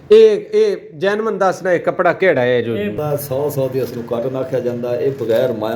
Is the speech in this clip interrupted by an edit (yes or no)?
yes